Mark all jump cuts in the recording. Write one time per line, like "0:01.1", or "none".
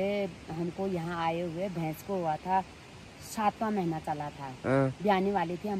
none

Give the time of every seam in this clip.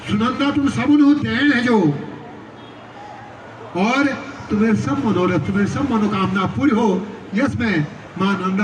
none

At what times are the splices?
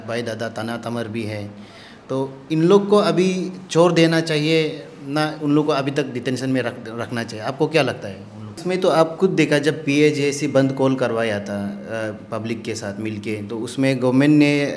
0:08.5

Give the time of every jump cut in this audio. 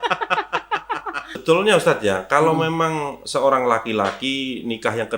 0:01.4

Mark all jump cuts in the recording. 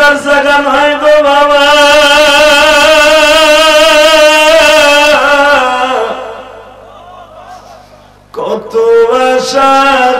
none

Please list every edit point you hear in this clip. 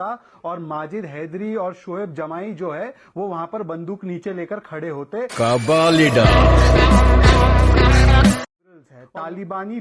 0:08.7

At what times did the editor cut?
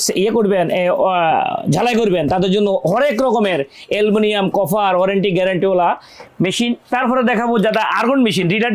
none

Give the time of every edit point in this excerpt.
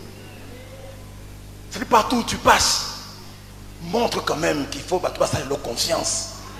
none

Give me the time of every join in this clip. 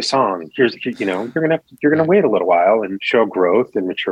0:03.0

